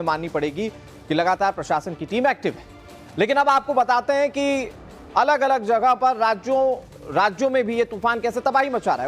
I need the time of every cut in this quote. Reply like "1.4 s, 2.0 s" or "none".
6.4 s